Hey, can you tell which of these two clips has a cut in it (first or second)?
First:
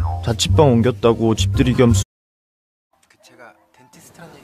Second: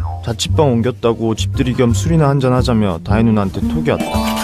second